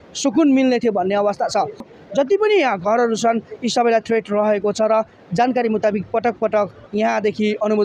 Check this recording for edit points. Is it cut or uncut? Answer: cut